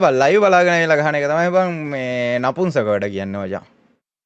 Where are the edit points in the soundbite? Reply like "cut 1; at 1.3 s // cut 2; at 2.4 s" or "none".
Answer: none